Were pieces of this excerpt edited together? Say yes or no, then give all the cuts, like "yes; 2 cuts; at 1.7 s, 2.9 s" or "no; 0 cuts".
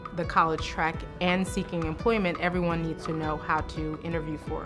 no; 0 cuts